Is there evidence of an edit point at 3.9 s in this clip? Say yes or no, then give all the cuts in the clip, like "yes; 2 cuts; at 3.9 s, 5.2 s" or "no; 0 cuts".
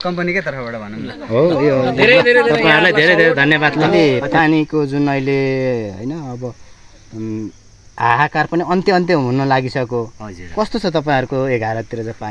yes; 1 cut; at 3.9 s